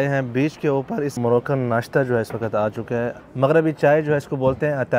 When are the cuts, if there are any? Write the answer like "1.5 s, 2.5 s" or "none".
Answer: 1.2 s, 3.2 s